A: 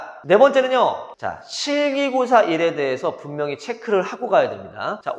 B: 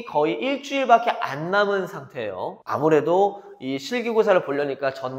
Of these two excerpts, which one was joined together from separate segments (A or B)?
A